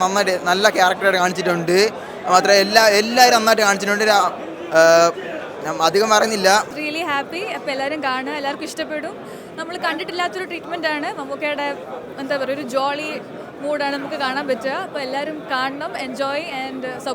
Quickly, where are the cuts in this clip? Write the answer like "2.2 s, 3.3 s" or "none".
6.7 s